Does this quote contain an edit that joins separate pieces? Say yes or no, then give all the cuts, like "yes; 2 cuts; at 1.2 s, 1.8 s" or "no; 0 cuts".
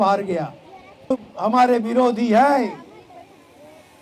yes; 1 cut; at 1.3 s